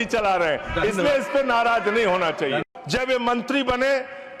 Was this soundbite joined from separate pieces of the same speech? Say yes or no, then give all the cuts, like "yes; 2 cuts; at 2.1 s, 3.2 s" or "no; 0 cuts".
yes; 1 cut; at 2.6 s